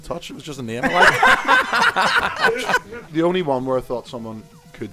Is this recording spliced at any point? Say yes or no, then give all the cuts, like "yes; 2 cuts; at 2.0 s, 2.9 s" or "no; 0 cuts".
yes; 1 cut; at 3.1 s